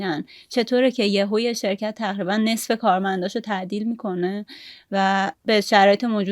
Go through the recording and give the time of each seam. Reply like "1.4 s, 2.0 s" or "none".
5.3 s